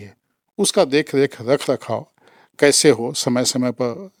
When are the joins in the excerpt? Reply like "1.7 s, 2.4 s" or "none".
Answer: none

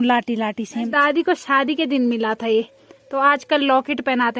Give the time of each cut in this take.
0.9 s

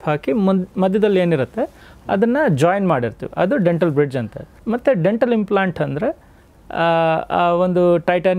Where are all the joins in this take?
4.5 s

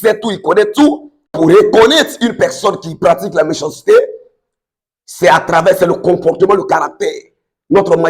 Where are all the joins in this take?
1.4 s

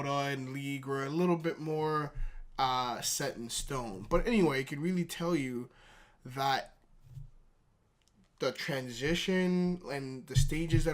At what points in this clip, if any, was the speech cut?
3.7 s

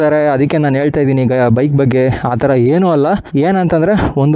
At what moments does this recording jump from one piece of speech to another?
3.2 s

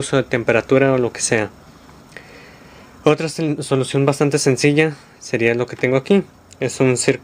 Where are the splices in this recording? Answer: 6.1 s

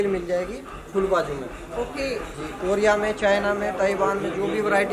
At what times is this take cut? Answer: none

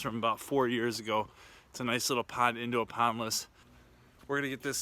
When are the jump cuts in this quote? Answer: 3.7 s

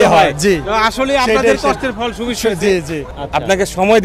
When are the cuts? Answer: 3.1 s

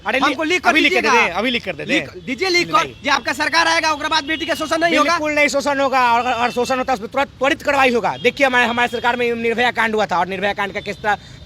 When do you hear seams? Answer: none

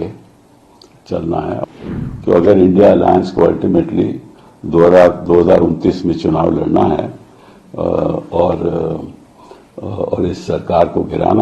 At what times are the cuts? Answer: 1.6 s

